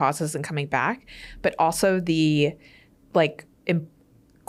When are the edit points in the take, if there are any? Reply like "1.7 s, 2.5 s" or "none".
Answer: none